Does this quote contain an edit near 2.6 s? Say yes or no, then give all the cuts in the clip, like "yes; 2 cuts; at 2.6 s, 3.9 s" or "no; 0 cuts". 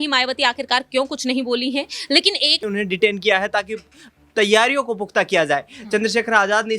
yes; 1 cut; at 2.6 s